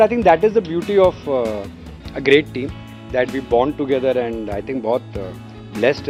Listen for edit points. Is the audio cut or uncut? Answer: uncut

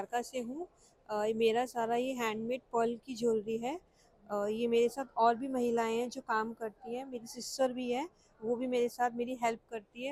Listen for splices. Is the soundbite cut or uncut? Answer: uncut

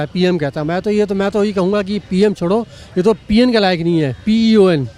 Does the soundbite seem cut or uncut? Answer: uncut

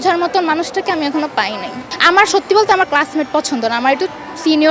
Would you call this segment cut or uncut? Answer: cut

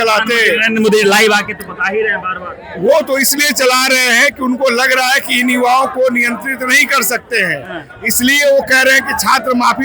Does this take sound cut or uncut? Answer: uncut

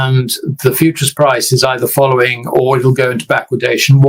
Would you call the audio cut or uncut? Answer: uncut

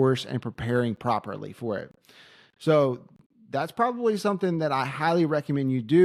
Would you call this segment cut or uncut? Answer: uncut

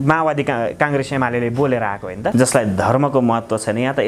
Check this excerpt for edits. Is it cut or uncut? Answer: cut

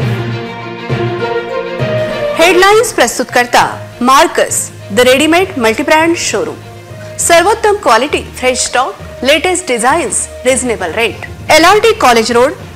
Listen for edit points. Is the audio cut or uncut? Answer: uncut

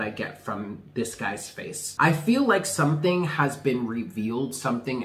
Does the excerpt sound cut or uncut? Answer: cut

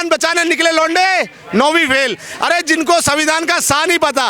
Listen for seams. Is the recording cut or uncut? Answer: uncut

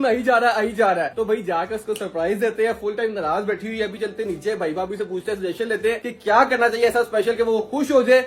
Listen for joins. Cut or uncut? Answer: uncut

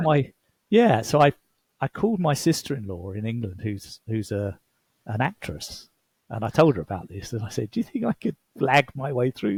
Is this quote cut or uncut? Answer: uncut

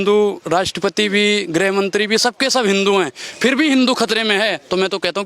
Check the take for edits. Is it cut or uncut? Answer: uncut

